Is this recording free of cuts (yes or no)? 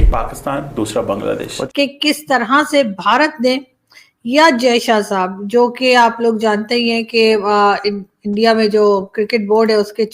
no